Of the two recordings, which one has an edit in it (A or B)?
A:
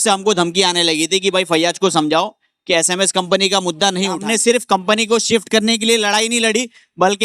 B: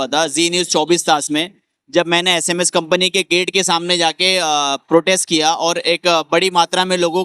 A